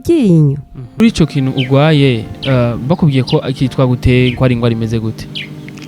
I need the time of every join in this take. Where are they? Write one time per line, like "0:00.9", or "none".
0:01.0